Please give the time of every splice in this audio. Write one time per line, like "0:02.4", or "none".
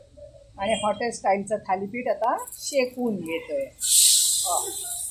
none